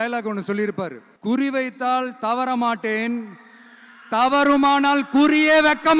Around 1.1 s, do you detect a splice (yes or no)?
yes